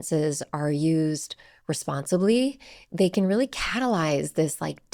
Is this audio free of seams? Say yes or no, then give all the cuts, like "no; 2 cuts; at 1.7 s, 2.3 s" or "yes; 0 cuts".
yes; 0 cuts